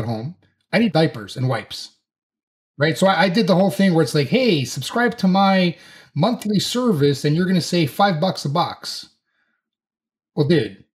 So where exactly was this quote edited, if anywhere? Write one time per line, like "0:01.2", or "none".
0:00.9